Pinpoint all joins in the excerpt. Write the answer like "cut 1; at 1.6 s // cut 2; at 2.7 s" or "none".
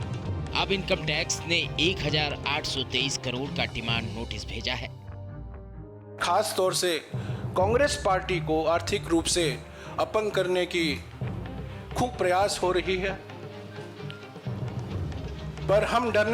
cut 1; at 13.2 s // cut 2; at 14.8 s // cut 3; at 15.7 s

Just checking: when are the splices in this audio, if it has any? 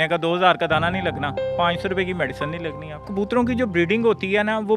cut 1; at 3.1 s

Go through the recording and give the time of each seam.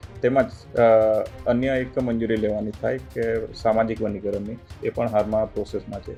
none

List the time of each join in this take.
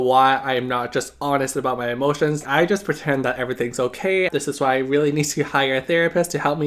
cut 1; at 2.4 s // cut 2; at 4.3 s

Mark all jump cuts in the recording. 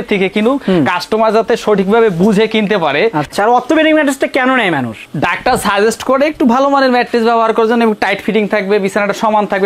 cut 1; at 3.3 s

